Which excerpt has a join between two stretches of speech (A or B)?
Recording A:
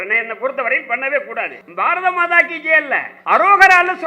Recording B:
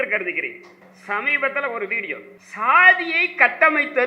A